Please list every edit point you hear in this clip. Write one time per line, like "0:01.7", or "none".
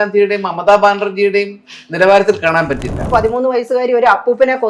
0:03.1